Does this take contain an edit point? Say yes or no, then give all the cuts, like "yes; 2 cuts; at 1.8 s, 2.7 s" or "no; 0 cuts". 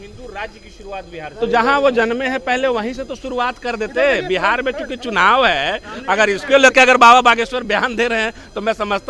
no; 0 cuts